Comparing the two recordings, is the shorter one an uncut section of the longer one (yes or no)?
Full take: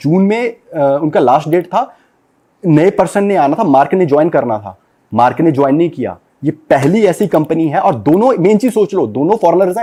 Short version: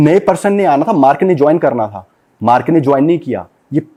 yes